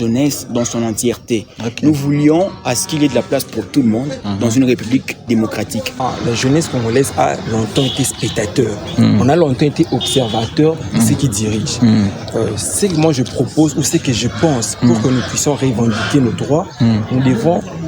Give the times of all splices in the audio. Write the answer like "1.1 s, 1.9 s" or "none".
6.0 s